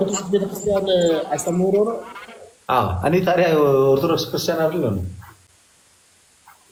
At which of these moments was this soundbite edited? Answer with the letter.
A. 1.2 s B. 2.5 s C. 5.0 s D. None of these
D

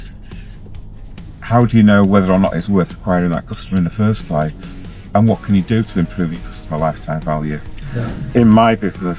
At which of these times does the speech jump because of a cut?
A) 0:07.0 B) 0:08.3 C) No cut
B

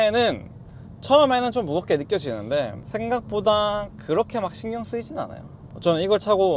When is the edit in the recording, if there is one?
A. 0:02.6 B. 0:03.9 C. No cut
C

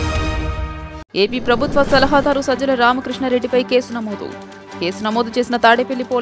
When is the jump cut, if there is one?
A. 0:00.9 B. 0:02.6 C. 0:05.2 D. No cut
A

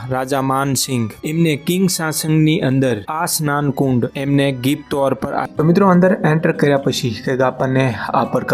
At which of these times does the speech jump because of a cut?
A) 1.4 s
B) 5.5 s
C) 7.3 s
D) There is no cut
B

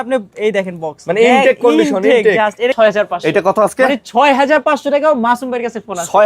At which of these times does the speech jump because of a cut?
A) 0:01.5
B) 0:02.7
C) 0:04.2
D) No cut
B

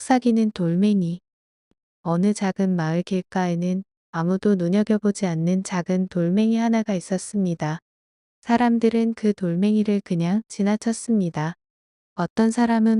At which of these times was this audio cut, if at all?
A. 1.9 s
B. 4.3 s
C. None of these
A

